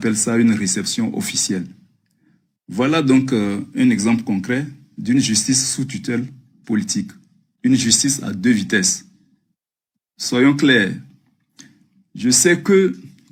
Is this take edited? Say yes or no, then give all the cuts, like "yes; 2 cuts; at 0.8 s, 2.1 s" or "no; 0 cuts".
no; 0 cuts